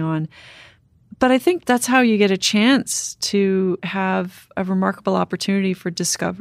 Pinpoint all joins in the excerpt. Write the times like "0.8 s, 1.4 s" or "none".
1.6 s, 4.5 s

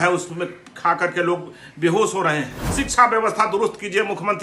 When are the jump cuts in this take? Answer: 2.6 s

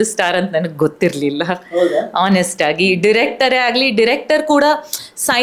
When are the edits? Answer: none

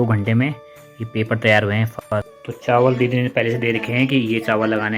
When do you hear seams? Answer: 1.9 s

